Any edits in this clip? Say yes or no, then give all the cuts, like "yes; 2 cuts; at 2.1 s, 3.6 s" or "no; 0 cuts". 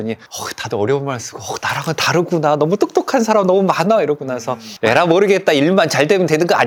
no; 0 cuts